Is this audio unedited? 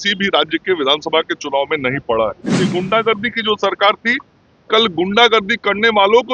no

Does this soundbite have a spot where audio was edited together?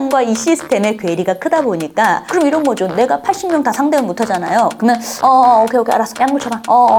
no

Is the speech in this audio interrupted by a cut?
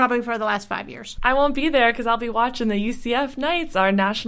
yes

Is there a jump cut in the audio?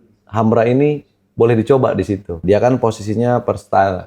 yes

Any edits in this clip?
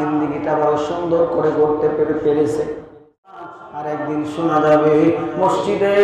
yes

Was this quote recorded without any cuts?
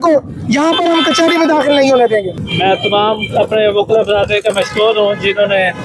yes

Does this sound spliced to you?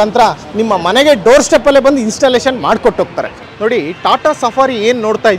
no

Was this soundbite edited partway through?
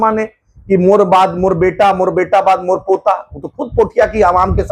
no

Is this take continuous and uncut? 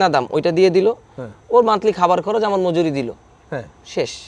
yes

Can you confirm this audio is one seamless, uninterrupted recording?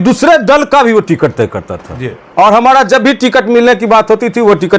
yes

